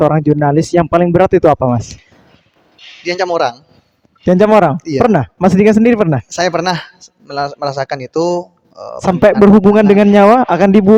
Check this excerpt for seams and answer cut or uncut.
uncut